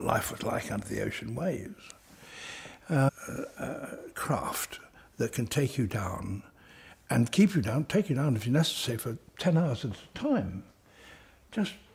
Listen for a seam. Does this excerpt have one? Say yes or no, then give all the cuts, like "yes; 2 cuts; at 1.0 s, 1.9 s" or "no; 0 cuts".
no; 0 cuts